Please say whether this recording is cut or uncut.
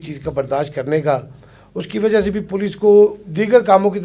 uncut